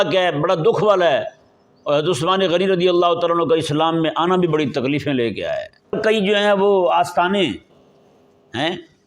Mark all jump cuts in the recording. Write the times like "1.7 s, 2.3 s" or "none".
6.0 s